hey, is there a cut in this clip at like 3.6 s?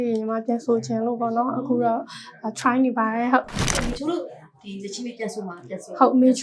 yes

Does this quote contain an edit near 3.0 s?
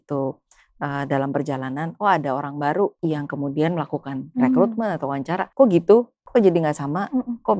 yes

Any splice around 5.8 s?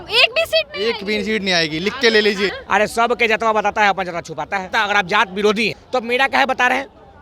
yes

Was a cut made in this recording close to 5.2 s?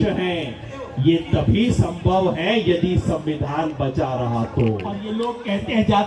yes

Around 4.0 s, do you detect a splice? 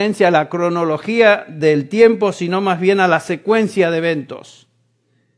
no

